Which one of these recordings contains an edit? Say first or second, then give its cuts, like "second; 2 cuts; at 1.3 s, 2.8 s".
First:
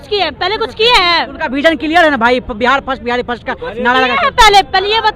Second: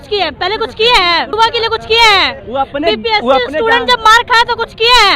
second; 1 cut; at 1.3 s